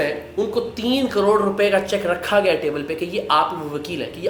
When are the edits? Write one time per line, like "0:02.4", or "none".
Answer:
none